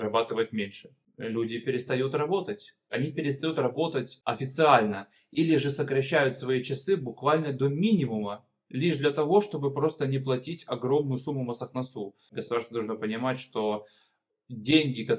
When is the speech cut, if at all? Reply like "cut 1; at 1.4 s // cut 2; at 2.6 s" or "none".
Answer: cut 1; at 1.0 s // cut 2; at 2.9 s // cut 3; at 4.1 s // cut 4; at 12.3 s